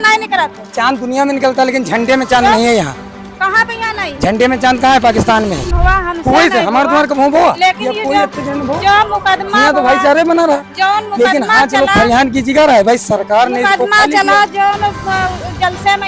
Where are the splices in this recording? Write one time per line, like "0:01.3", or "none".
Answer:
0:05.7